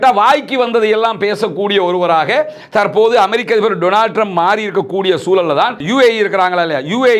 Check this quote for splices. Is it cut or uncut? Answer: cut